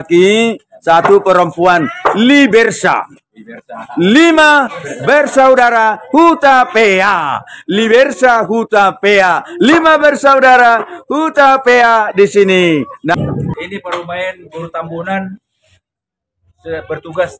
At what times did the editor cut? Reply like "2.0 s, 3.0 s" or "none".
13.1 s